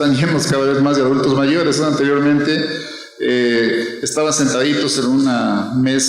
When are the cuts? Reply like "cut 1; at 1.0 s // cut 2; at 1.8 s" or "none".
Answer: cut 1; at 4.4 s